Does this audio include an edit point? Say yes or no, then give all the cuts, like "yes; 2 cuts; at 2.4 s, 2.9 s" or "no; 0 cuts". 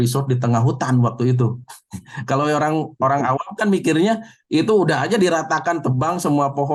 no; 0 cuts